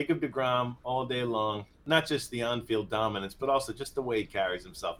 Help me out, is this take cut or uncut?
cut